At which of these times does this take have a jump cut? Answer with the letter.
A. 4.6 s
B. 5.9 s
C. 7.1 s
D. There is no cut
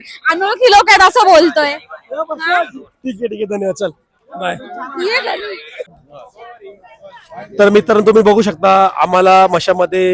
D